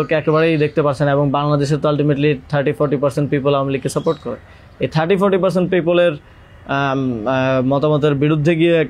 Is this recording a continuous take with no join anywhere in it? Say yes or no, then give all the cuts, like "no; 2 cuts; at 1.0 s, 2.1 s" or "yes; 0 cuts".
yes; 0 cuts